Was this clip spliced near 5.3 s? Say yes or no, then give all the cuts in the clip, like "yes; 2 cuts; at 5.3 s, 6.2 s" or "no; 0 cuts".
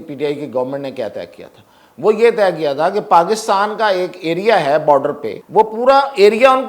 yes; 1 cut; at 5.3 s